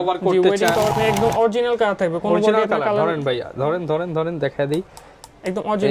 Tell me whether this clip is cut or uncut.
cut